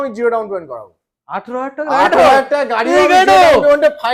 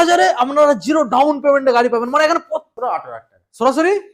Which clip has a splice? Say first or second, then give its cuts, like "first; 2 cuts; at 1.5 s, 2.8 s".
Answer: second; 1 cut; at 2.7 s